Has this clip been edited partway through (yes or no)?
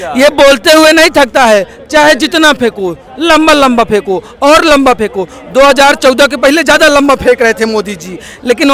no